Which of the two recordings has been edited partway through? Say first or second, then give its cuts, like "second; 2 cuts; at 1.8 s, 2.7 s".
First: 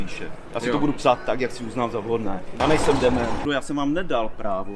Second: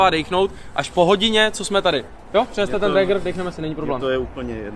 first; 2 cuts; at 2.6 s, 3.4 s